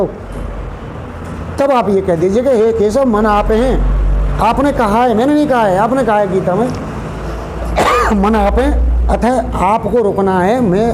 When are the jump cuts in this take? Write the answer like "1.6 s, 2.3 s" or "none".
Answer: none